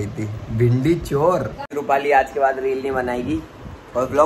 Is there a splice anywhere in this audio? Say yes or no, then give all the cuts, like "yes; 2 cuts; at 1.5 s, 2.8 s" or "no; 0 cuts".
yes; 1 cut; at 1.7 s